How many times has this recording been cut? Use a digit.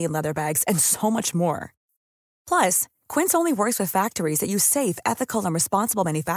0